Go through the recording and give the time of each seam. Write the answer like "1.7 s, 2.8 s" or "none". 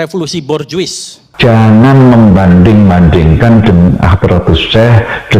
1.2 s